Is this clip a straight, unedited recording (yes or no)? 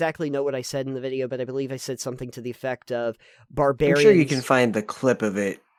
yes